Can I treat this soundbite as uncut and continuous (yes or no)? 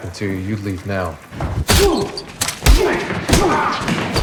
yes